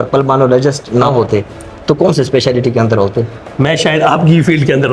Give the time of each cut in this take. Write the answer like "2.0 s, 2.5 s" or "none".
1.1 s, 3.4 s

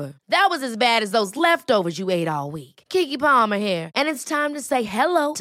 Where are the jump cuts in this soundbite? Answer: none

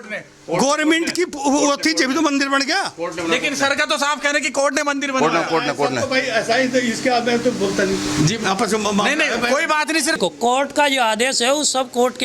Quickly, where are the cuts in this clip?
10.2 s

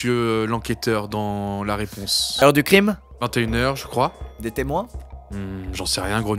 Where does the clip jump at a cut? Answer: 2.2 s

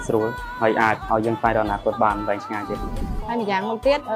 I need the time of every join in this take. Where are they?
2.7 s

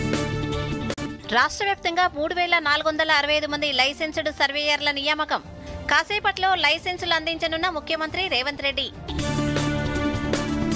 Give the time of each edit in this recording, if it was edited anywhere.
0.9 s

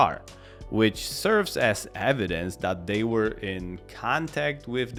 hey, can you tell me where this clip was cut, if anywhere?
none

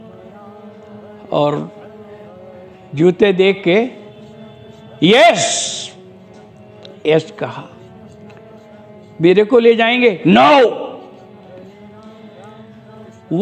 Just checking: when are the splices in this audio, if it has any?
none

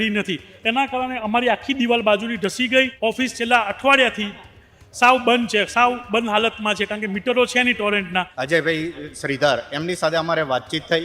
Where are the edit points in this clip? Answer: 2.9 s, 8.4 s

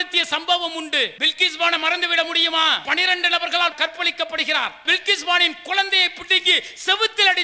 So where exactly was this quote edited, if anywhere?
1.2 s, 2.8 s

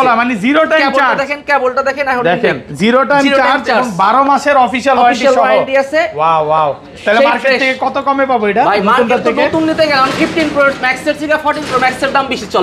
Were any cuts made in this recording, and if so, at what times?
none

